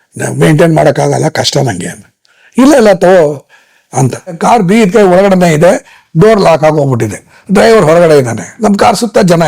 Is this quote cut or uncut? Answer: cut